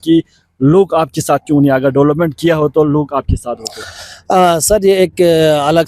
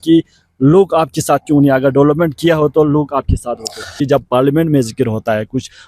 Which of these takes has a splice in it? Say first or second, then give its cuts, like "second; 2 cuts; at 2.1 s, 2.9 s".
second; 1 cut; at 4.0 s